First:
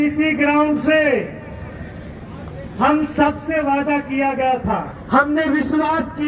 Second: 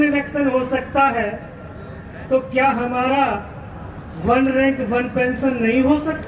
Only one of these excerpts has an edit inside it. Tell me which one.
first; 1 cut; at 4.9 s

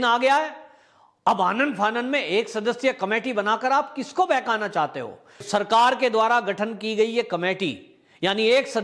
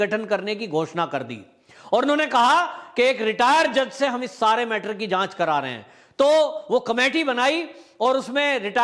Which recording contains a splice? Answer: first; 1 cut; at 5.4 s

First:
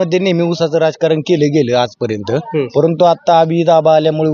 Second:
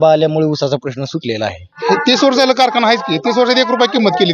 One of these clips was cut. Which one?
second; 1 cut; at 1.8 s

